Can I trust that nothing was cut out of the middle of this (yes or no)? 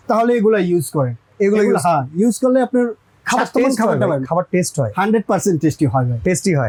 yes